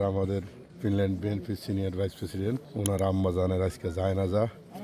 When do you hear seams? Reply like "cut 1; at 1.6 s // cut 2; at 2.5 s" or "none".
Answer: cut 1; at 2.7 s